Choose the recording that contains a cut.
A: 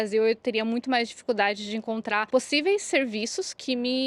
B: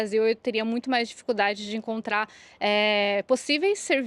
A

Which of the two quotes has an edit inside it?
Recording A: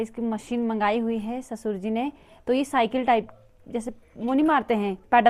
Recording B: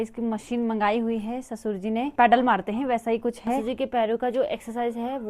B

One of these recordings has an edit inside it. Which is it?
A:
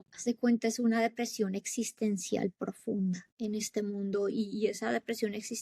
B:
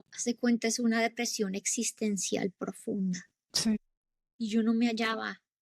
A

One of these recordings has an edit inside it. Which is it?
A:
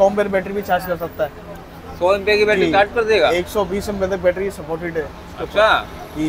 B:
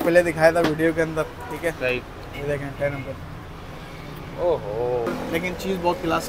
B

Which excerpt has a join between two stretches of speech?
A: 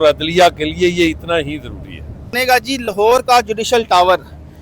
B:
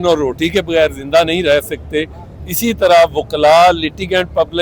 A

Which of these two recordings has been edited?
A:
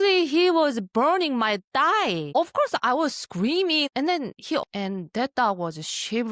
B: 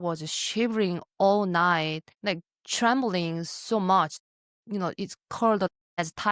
A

